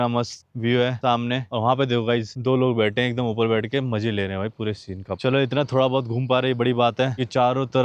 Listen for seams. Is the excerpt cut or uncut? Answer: uncut